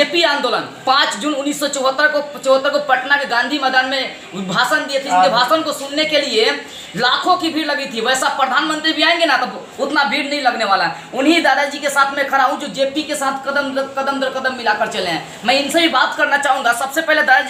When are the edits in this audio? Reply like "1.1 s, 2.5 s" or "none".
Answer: none